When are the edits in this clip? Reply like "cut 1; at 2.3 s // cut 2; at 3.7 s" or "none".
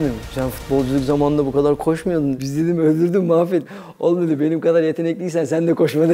cut 1; at 2.4 s // cut 2; at 3.7 s